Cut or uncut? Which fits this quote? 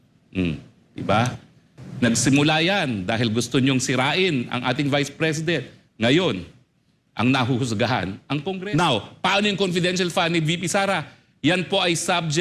cut